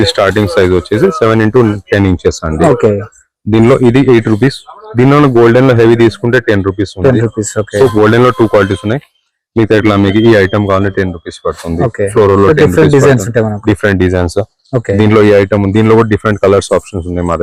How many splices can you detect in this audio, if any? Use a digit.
0